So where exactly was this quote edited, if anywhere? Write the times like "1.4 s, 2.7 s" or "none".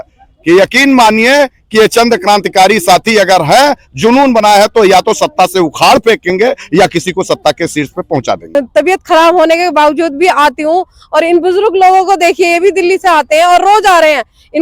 8.4 s